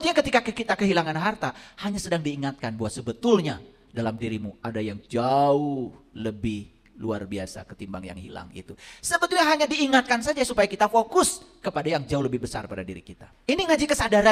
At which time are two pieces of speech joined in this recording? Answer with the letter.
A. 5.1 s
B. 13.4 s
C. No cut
B